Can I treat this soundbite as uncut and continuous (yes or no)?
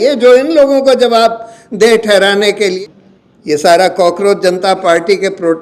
no